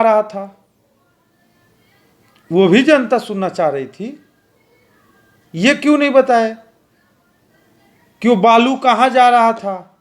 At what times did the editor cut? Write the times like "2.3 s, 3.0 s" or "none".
none